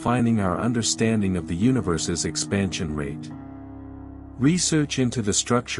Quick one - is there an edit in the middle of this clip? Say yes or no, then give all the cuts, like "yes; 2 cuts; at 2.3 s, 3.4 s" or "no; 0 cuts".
no; 0 cuts